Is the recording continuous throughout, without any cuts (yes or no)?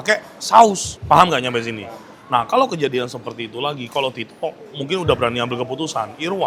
yes